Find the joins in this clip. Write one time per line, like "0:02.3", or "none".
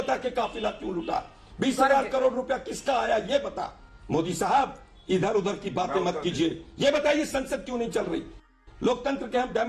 none